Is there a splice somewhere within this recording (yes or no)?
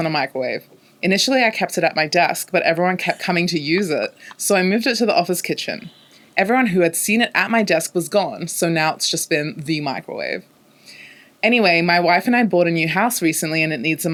no